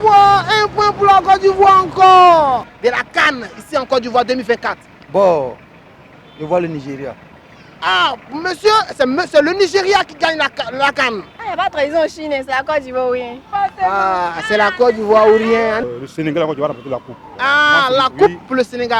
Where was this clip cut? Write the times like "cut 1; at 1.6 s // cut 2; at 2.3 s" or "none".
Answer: cut 1; at 2.7 s // cut 2; at 11.3 s // cut 3; at 15.9 s // cut 4; at 17.2 s